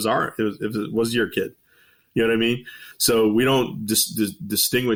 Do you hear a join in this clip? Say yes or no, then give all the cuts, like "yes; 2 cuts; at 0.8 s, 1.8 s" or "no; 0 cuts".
no; 0 cuts